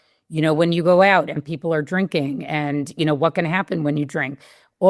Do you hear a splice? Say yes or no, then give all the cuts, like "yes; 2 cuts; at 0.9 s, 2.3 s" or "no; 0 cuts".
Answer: no; 0 cuts